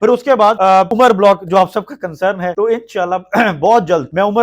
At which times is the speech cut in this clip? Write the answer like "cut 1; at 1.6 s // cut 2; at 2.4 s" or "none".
cut 1; at 0.9 s

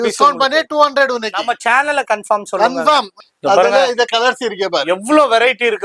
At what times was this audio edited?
cut 1; at 3.2 s

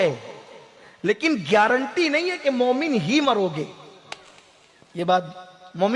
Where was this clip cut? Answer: none

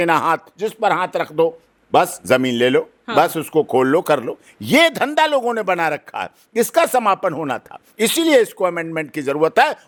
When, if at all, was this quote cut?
none

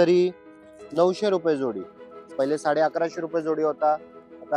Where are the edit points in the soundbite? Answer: cut 1; at 2.3 s

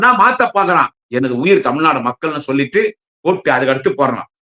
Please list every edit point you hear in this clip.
cut 1; at 1.0 s

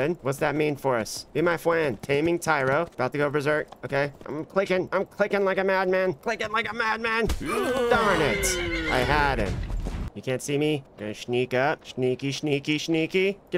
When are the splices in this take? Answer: cut 1; at 10.1 s

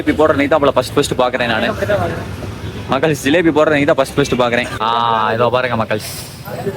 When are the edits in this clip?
cut 1; at 4.8 s

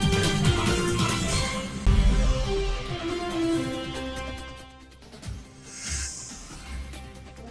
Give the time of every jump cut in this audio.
none

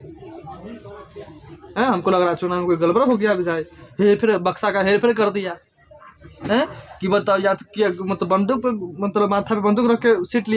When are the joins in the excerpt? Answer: none

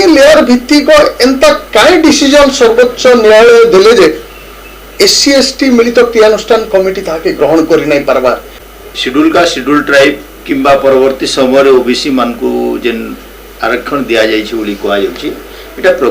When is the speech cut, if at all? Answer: cut 1; at 8.5 s

